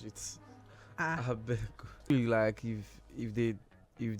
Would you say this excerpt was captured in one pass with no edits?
no; 1 cut; at 2.1 s

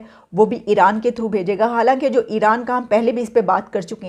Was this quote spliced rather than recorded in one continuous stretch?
no; 0 cuts

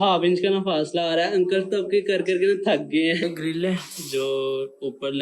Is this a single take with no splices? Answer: no; 1 cut; at 3.2 s

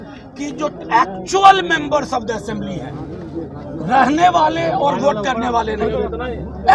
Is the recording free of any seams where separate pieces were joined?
yes; 0 cuts

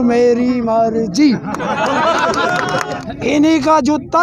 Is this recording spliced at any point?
yes; 1 cut; at 3.0 s

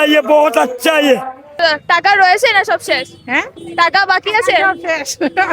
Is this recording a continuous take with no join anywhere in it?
no; 1 cut; at 1.4 s

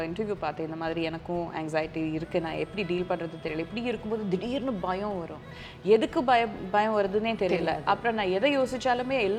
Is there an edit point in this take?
no; 0 cuts

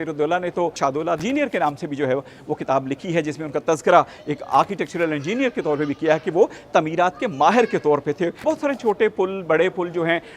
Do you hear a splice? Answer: yes; 2 cuts; at 1.0 s, 8.4 s

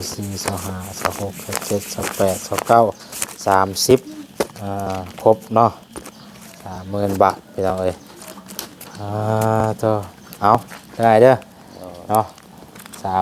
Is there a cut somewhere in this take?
no; 0 cuts

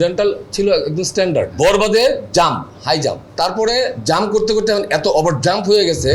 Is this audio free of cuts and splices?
no; 2 cuts; at 1.5 s, 3.2 s

